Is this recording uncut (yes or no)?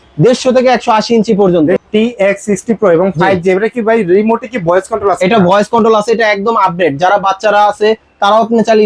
no